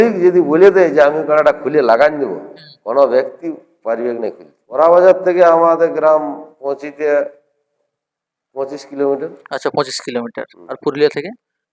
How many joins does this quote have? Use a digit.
1